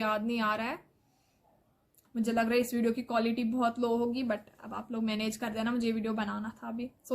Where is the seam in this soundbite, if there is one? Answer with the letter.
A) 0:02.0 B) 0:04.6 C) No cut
A